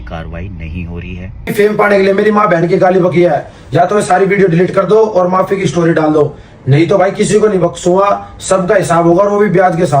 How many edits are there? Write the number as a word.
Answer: one